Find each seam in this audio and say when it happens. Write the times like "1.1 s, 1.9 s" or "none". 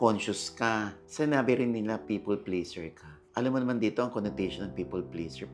none